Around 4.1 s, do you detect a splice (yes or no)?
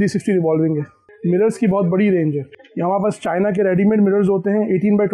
no